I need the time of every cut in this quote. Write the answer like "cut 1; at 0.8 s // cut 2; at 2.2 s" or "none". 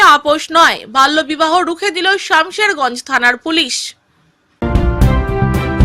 cut 1; at 4.6 s

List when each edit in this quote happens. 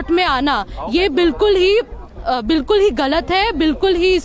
none

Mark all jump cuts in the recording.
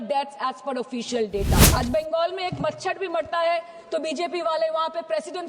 cut 1; at 1.6 s

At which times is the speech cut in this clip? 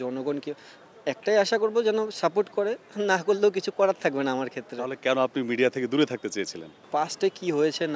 cut 1; at 6.8 s

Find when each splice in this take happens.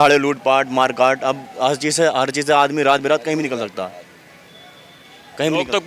none

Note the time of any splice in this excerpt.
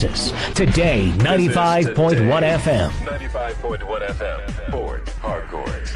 cut 1; at 3.0 s

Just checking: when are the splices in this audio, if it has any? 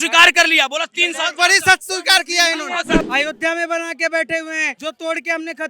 cut 1; at 3.1 s // cut 2; at 4.7 s

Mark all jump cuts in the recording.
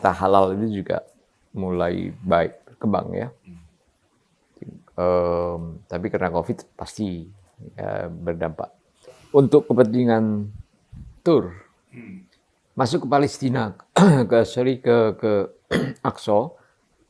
cut 1; at 9.2 s

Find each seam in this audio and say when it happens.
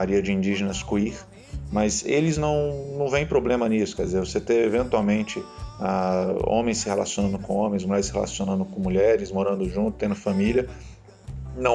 none

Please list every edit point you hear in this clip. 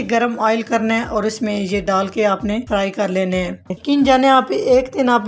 cut 1; at 2.6 s // cut 2; at 3.8 s

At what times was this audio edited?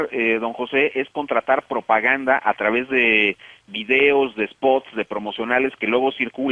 cut 1; at 1.1 s

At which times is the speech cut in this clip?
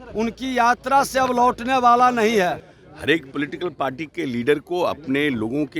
cut 1; at 2.6 s

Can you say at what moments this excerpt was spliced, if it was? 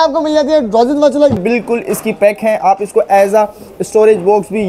cut 1; at 1.4 s

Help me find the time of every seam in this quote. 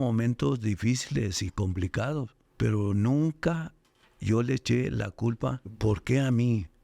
cut 1; at 2.4 s // cut 2; at 5.7 s

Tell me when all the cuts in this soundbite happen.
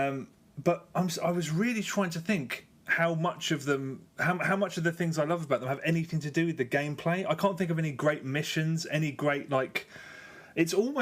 cut 1; at 1.9 s

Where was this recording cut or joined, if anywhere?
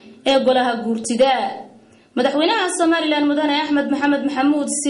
cut 1; at 1.9 s

